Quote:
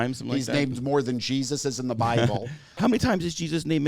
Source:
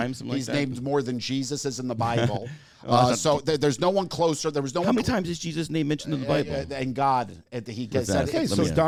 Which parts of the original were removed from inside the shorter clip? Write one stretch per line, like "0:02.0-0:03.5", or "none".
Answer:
0:02.8-0:04.8